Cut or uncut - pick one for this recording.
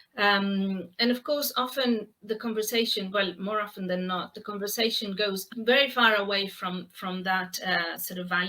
cut